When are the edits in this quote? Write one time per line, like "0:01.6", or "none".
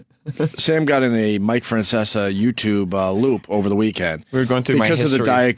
0:03.6